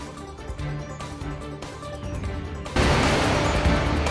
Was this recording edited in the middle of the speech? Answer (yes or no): yes